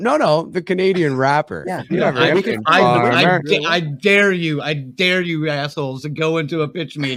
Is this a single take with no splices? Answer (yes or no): yes